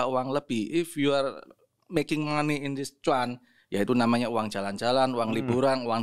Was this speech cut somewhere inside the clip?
no; 0 cuts

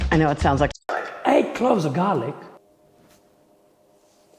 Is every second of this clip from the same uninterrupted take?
no; 1 cut; at 2.6 s

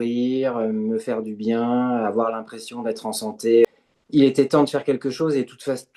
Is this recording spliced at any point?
yes; 1 cut; at 3.6 s

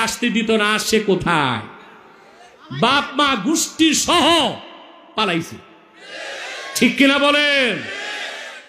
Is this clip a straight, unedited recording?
yes; 0 cuts

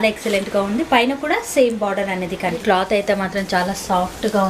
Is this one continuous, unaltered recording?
no; 1 cut; at 2.6 s

